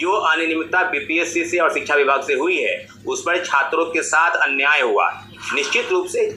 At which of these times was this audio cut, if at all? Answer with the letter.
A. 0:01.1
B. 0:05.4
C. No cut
B